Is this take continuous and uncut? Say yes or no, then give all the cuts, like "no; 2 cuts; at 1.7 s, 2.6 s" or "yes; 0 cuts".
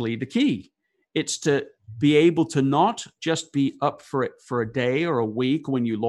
yes; 0 cuts